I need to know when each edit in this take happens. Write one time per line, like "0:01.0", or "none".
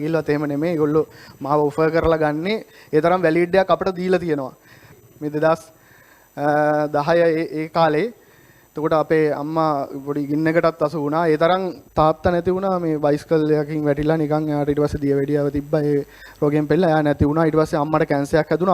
0:05.0
0:11.8